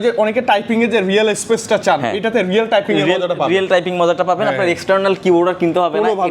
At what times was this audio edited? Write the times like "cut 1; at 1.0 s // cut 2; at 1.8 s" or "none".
none